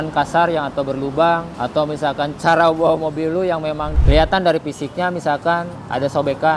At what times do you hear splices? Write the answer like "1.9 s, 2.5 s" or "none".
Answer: 3.9 s